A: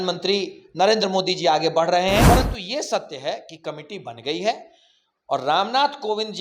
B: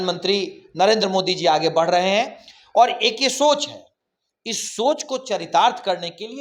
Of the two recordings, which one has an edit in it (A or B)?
A